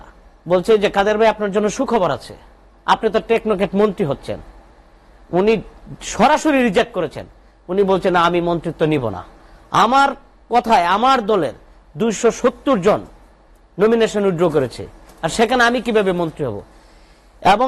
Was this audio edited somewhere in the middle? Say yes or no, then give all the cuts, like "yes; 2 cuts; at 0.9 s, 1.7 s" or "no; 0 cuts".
no; 0 cuts